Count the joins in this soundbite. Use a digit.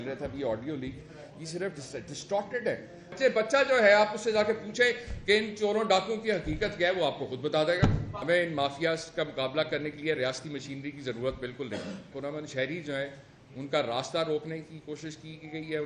3